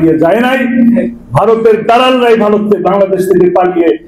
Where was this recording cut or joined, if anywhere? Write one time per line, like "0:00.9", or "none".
none